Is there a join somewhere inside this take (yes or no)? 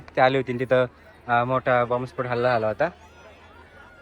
no